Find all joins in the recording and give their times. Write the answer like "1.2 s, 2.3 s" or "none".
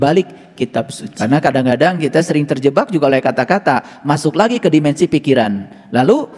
1.0 s